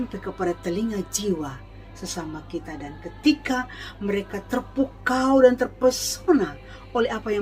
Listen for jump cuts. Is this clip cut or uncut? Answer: uncut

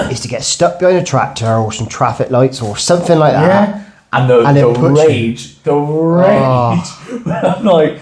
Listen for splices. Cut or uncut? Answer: uncut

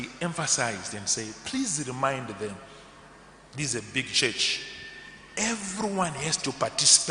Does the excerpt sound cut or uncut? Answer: uncut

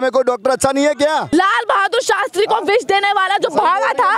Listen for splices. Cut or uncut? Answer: cut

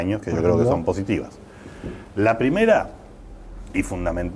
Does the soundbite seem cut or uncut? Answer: uncut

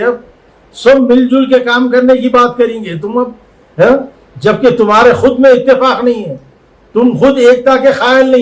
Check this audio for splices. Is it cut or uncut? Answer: uncut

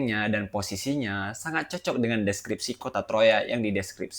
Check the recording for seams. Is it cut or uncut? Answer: uncut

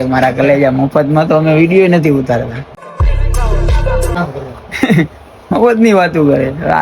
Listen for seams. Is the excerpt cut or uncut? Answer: cut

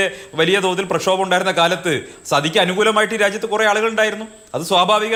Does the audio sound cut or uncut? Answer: uncut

